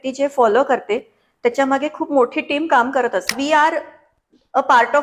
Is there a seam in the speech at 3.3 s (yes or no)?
yes